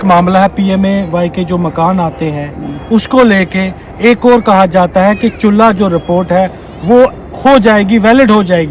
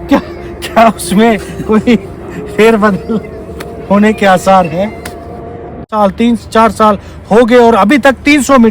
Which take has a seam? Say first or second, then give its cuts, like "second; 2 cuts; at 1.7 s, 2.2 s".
second; 1 cut; at 5.9 s